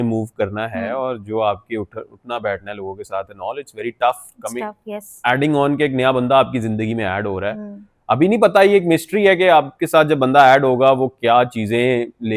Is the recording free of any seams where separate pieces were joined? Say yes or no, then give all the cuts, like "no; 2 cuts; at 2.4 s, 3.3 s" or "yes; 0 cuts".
yes; 0 cuts